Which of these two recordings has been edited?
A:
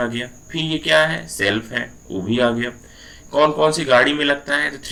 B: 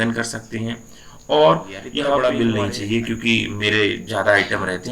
B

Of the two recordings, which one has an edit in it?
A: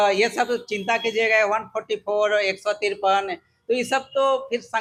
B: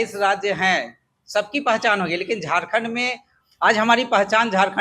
B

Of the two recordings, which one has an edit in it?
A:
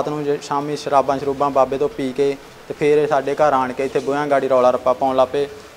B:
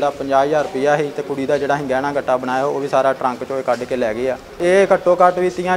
B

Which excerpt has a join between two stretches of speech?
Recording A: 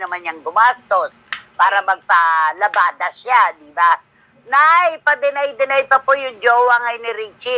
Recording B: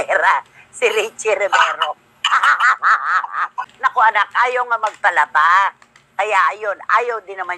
B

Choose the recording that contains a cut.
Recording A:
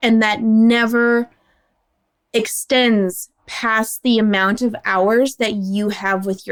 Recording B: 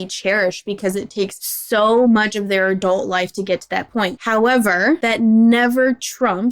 B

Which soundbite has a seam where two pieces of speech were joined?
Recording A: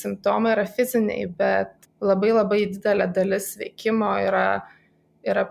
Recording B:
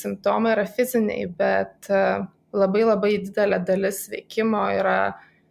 A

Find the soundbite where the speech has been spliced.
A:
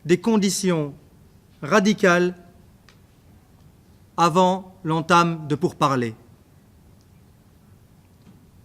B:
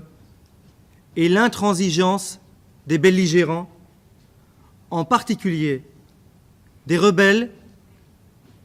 A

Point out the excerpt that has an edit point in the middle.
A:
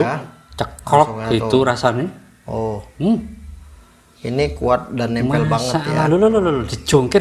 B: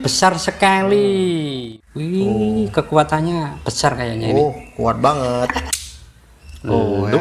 B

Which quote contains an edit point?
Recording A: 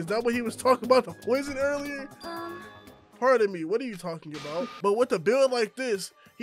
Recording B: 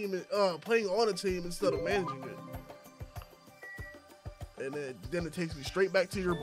A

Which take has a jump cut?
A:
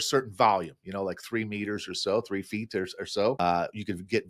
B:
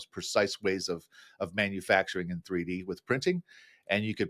A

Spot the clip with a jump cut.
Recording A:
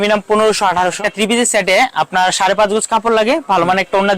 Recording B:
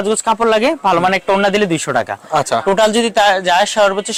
A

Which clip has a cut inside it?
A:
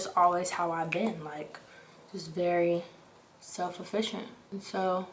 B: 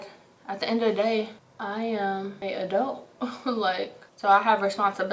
B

